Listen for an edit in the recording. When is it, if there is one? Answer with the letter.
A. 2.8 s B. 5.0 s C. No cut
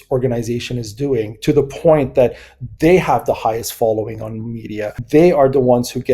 B